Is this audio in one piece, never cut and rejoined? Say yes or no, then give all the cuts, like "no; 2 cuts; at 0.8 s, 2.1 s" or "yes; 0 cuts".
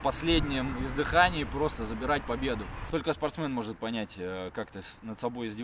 no; 1 cut; at 2.7 s